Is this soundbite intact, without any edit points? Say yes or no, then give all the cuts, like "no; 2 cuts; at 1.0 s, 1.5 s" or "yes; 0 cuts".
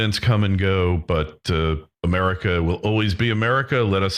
yes; 0 cuts